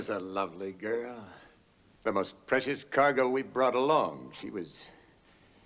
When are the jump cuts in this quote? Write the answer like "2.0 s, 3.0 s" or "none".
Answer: 4.0 s

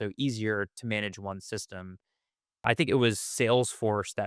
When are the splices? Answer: 2.6 s

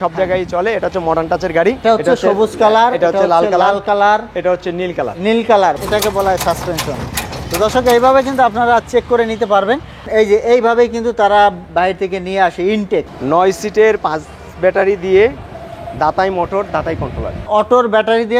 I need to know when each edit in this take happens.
1.8 s, 5.8 s, 10.1 s, 13.1 s, 17.5 s

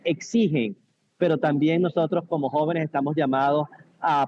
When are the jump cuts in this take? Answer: none

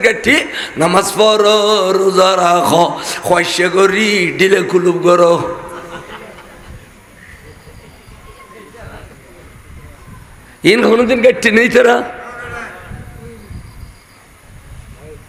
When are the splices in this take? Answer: none

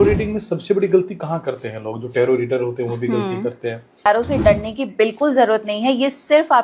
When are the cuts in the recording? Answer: 4.1 s

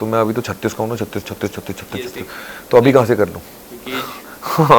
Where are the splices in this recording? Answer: none

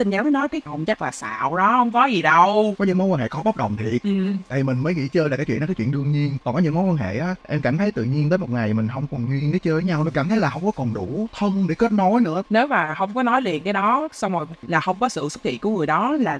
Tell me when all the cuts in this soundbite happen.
2.8 s, 12.4 s, 14.6 s

